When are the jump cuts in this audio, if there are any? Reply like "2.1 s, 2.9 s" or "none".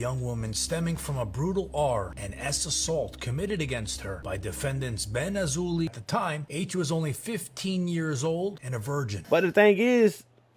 5.9 s, 9.2 s